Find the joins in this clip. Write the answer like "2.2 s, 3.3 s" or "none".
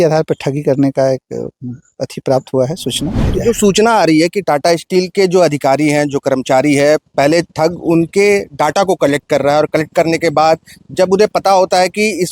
3.3 s

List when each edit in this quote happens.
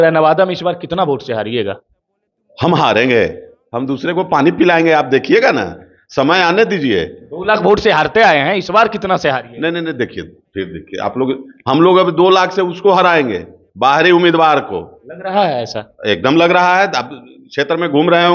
none

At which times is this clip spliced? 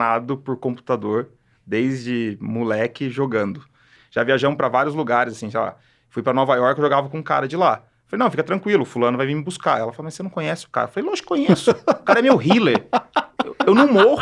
4.0 s

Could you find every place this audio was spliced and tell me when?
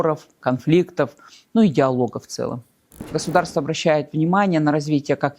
3.2 s

